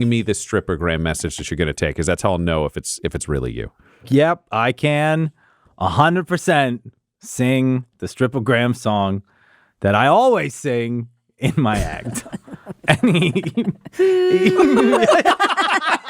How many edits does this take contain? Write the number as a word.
two